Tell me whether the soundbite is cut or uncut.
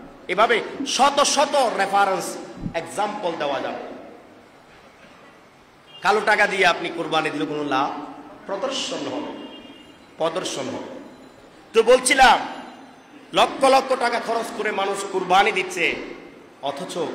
uncut